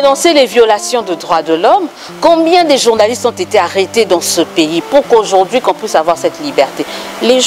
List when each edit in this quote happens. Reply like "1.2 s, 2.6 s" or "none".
none